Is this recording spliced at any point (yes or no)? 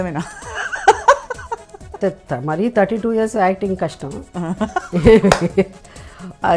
yes